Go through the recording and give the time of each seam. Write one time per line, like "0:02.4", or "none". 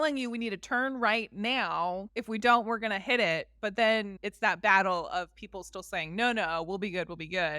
0:02.1
0:04.2

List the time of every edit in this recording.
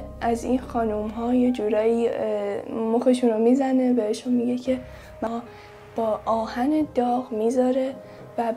0:03.7
0:05.3

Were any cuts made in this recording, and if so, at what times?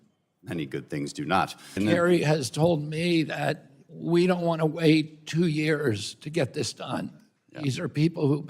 0:01.8

